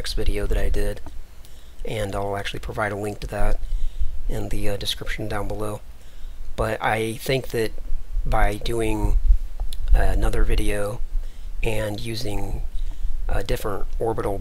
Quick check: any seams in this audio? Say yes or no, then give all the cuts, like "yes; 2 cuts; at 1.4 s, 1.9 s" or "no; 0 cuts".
no; 0 cuts